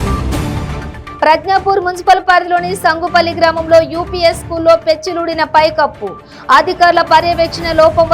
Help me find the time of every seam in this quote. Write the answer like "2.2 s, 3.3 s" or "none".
1.0 s